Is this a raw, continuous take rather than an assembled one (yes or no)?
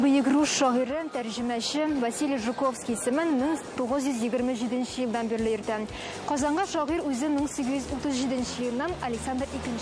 yes